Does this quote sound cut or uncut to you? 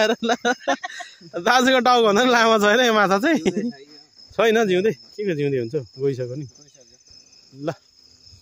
uncut